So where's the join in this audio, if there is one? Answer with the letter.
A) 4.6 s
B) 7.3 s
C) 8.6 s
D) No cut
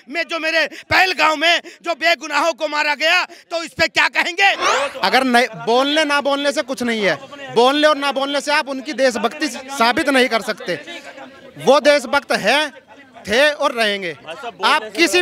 A